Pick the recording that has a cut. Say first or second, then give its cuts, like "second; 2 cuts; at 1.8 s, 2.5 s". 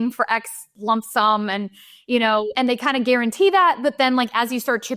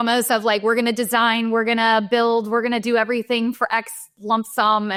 first; 1 cut; at 2.5 s